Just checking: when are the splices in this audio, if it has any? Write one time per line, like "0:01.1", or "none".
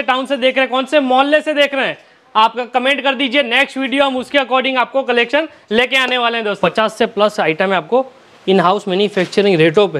0:06.6